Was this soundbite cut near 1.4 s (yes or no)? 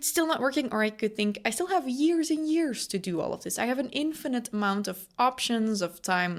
no